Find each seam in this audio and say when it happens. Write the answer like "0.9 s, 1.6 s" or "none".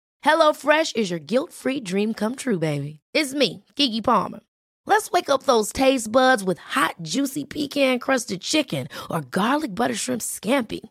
none